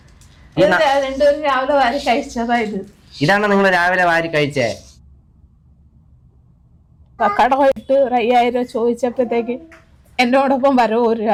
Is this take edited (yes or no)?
no